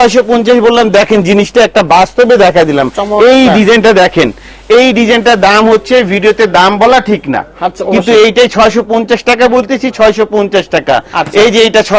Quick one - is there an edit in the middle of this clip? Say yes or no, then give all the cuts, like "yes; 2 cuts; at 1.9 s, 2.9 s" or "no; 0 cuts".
no; 0 cuts